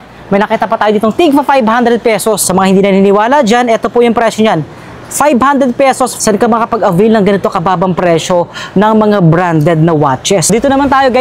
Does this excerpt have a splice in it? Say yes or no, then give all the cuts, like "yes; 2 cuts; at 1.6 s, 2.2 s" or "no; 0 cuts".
yes; 3 cuts; at 2.5 s, 6.2 s, 10.5 s